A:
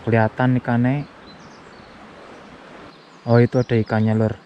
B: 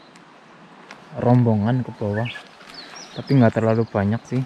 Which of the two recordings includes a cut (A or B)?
A